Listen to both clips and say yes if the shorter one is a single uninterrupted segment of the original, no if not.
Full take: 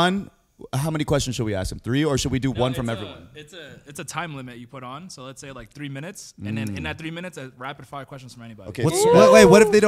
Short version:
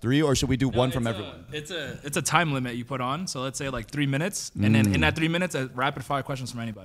yes